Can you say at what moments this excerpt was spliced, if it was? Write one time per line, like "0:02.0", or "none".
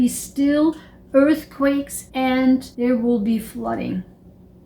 0:02.0
0:02.7

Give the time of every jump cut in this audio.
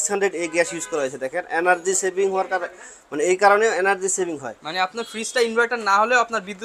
none

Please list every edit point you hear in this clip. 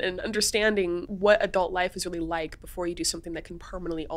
0:01.1

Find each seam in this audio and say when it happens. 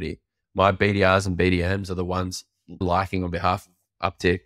0:02.8

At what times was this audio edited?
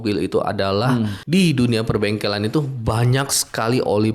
0:01.2

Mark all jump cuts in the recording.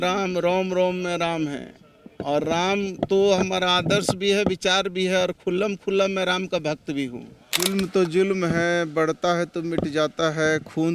0:07.7

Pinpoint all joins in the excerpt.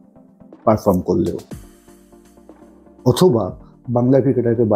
none

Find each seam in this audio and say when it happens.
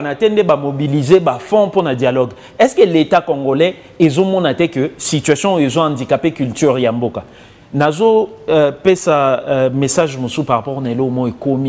none

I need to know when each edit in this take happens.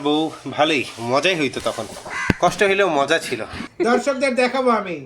0:03.6

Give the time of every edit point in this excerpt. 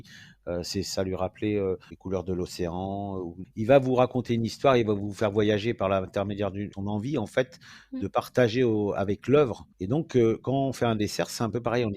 0:01.9
0:03.4
0:06.7
0:09.7

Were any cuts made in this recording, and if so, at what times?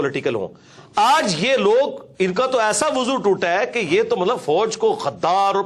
none

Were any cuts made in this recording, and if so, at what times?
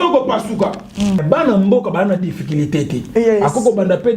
0:01.2

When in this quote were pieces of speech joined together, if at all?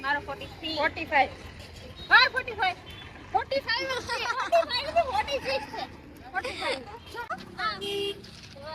0:07.3

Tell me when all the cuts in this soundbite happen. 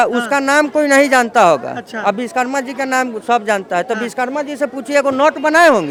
none

